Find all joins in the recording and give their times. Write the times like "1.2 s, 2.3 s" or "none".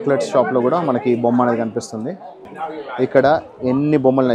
2.5 s